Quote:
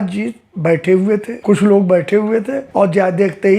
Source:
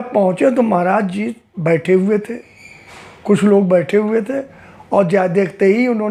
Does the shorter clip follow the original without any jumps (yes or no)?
no